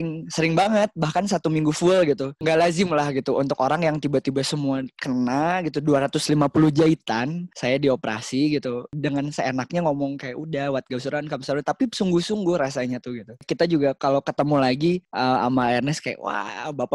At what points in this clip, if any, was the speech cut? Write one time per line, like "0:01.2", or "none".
0:02.4
0:07.5
0:09.0
0:13.3